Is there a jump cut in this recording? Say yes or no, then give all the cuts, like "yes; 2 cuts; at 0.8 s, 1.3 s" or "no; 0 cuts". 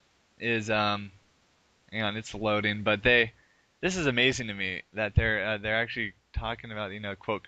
yes; 1 cut; at 3.3 s